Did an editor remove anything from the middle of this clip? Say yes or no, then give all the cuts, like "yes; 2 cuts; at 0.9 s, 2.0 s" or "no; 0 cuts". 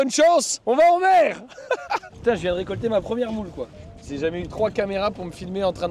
yes; 2 cuts; at 2.1 s, 4.1 s